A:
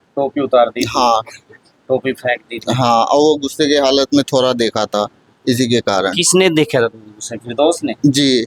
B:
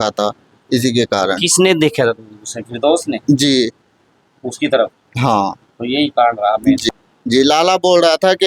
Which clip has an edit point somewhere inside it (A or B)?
B